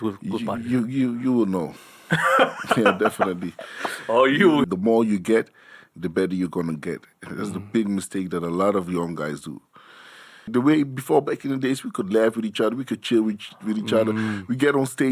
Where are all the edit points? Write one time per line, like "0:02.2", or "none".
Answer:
0:04.7
0:10.5